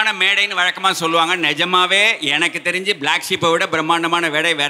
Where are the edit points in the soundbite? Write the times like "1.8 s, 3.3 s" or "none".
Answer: none

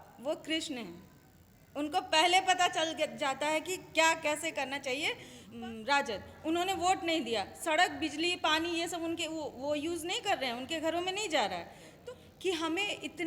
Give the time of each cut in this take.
5.4 s, 11.9 s

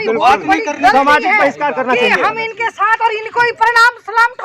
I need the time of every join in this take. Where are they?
1.6 s

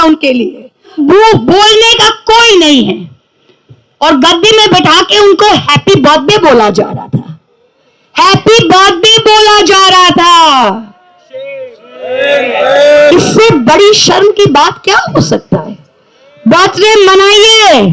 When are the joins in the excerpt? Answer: 0.9 s

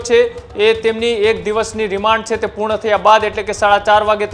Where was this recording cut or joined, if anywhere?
none

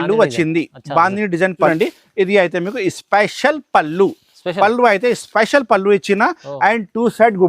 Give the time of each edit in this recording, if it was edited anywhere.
1.7 s

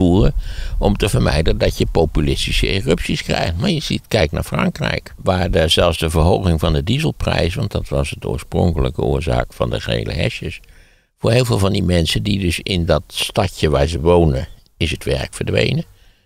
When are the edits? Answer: 5.2 s

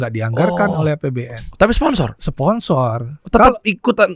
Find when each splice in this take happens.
2.2 s, 3.1 s

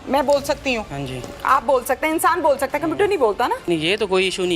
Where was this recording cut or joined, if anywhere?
3.6 s

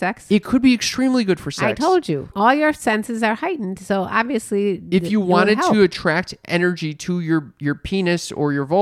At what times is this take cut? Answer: 2.3 s

